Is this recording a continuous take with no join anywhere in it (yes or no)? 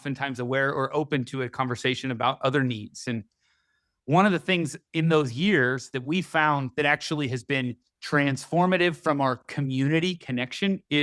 yes